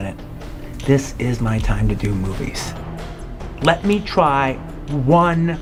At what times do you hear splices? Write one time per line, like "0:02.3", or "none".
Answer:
none